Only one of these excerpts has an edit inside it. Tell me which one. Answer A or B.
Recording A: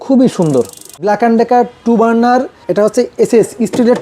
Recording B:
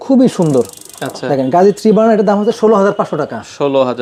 A